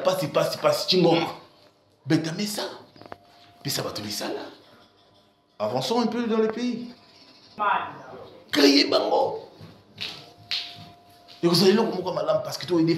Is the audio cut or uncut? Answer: cut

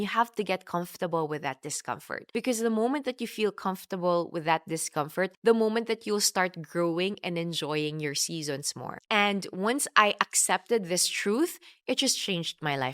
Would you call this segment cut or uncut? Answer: cut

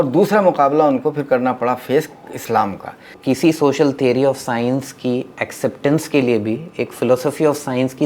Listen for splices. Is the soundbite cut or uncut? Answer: cut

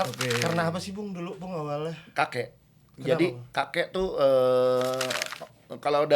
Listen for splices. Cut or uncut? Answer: uncut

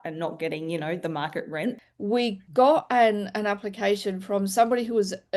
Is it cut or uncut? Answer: cut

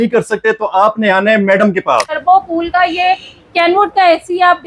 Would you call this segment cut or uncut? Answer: cut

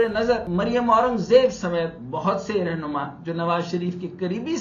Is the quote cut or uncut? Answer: uncut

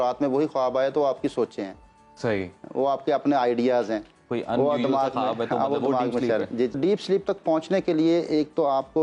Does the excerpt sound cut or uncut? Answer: cut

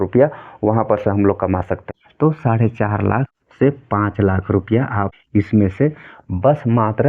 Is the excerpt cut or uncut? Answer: cut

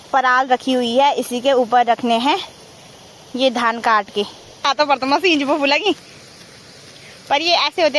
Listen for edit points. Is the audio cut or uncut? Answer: cut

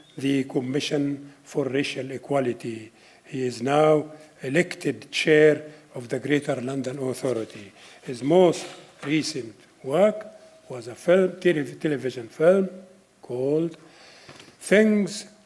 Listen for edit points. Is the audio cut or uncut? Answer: cut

